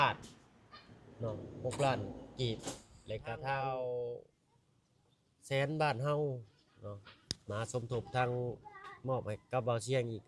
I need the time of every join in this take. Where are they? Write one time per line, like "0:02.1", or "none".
0:03.6